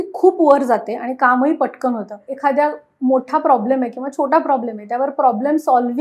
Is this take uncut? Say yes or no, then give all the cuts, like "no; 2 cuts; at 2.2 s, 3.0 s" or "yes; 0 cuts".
no; 1 cut; at 2.3 s